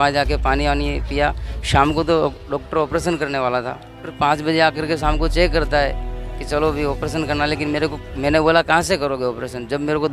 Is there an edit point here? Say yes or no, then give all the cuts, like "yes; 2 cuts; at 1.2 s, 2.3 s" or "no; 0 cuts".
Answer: yes; 1 cut; at 4.1 s